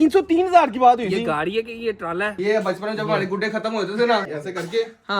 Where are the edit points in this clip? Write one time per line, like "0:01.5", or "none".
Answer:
0:02.4
0:04.2